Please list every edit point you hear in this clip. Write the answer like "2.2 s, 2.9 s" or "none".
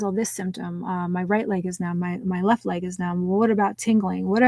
none